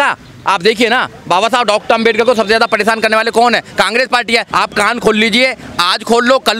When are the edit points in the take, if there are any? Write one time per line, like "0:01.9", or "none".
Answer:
0:04.5